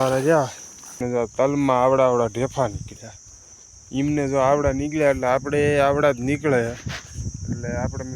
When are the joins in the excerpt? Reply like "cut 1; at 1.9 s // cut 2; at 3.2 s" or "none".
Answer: cut 1; at 1.0 s